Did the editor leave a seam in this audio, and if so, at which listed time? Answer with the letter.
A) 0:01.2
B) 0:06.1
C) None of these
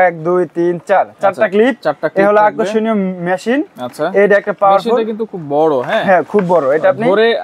C